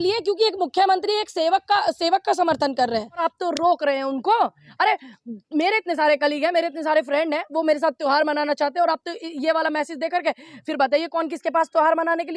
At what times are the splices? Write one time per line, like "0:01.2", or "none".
0:03.2